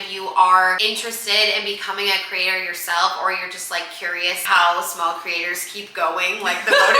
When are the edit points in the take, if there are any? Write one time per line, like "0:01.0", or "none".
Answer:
0:04.4